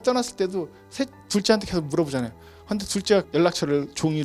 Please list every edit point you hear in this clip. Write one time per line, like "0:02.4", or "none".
0:03.3